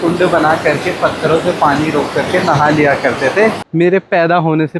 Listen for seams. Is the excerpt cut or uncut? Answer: cut